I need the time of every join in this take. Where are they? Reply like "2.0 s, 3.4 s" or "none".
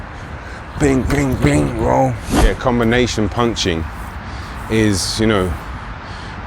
2.6 s